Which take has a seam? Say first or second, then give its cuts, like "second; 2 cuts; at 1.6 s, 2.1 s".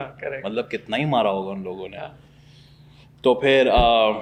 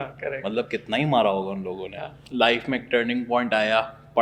second; 1 cut; at 2.1 s